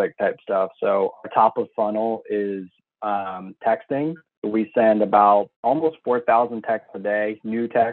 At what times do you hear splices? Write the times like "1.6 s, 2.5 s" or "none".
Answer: 4.3 s, 5.5 s